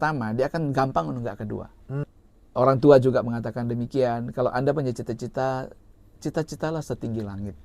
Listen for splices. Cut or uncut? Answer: cut